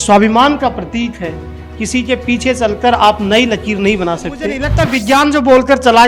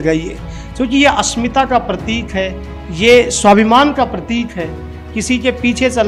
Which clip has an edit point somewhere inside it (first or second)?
first